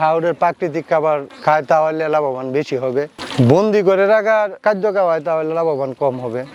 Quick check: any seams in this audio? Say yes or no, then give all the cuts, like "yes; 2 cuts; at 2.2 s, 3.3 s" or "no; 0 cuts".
no; 0 cuts